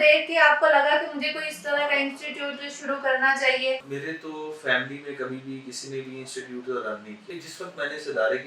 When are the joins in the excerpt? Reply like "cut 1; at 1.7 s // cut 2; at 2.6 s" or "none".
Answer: cut 1; at 3.9 s // cut 2; at 7.2 s

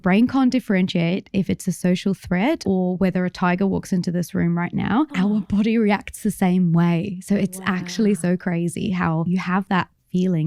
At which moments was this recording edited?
cut 1; at 2.6 s // cut 2; at 5.1 s // cut 3; at 9.2 s

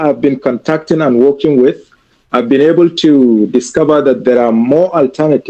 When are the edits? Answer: none

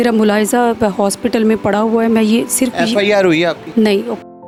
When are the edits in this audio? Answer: none

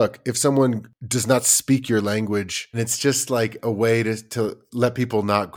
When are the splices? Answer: cut 1; at 0.9 s // cut 2; at 2.8 s

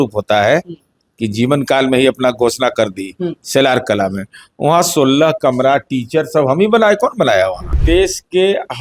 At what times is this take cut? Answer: cut 1; at 7.8 s

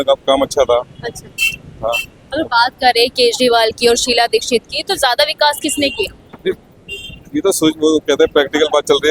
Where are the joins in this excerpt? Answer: none

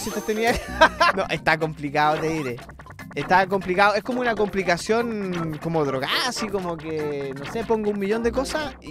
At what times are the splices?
none

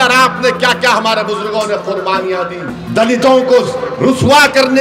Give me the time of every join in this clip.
cut 1; at 2.7 s

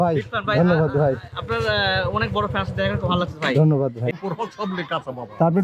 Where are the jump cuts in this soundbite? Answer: cut 1; at 2.7 s // cut 2; at 4.2 s

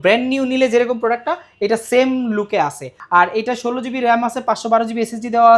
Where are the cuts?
none

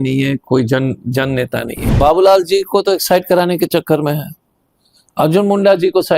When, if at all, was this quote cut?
cut 1; at 1.8 s

